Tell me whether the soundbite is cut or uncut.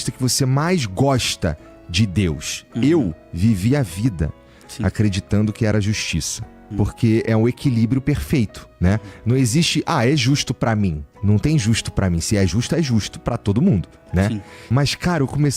cut